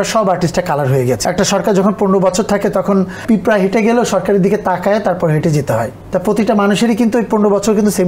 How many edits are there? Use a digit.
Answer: 3